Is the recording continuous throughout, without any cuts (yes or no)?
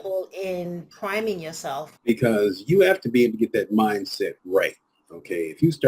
no